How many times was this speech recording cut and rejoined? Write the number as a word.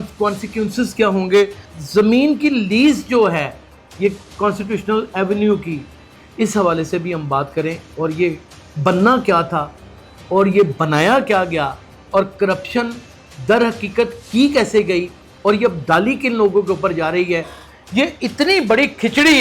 one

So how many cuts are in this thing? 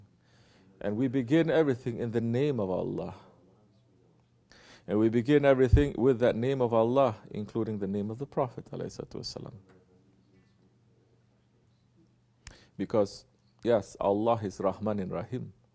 one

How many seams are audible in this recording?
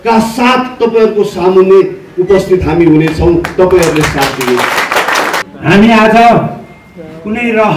one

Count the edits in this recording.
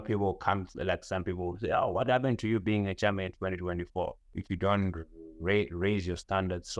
one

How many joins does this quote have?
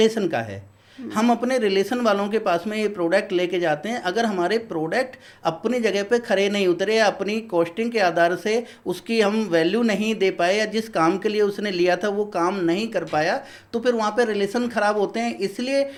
zero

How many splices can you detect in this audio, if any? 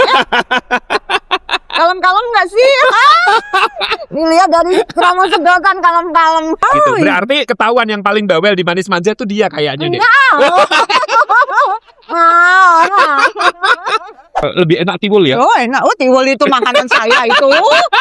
two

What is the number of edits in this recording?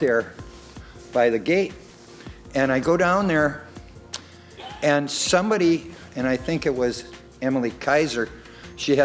one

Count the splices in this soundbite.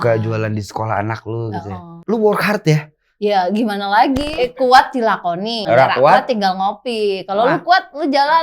three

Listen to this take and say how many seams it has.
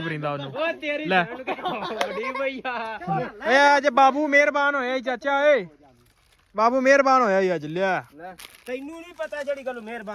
one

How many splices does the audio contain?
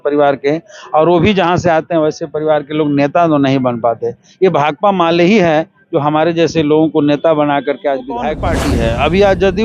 one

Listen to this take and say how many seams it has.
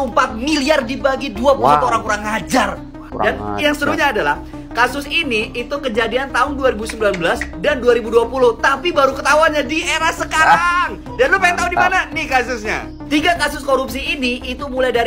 zero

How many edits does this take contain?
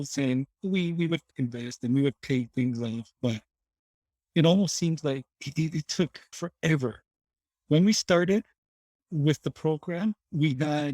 two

